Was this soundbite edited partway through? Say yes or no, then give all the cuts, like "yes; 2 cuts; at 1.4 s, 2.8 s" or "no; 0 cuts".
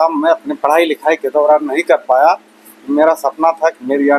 no; 0 cuts